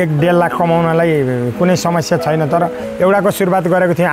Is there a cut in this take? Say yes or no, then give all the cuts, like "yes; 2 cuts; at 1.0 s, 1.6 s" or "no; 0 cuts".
yes; 1 cut; at 2.8 s